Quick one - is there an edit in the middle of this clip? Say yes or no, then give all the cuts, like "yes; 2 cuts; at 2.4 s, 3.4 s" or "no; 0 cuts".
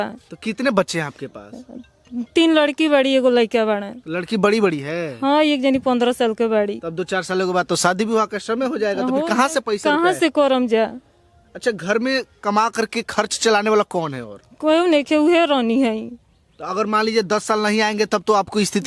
no; 0 cuts